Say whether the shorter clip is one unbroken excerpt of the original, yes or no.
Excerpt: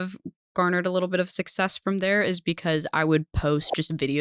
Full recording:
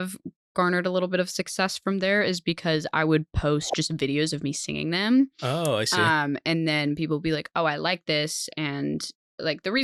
yes